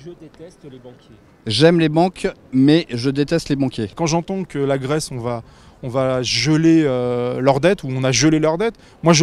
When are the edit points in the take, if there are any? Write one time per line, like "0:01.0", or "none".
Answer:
0:03.9